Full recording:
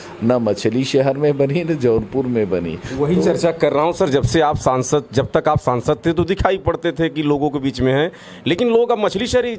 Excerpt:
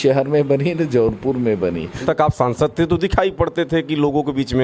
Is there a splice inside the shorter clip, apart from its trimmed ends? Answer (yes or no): yes